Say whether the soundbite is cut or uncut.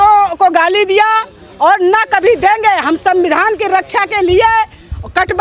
uncut